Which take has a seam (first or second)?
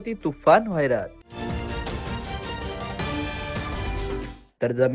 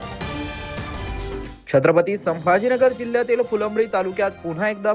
second